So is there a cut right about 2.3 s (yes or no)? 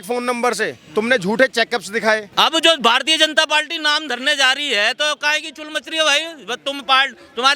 yes